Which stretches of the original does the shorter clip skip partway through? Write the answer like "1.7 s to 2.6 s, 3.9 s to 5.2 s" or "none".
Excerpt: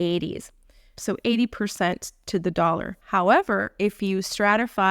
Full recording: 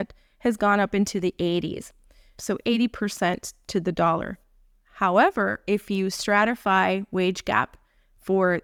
4.4 s to 4.8 s